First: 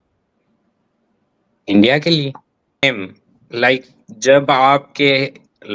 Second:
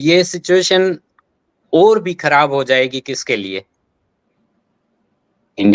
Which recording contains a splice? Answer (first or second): first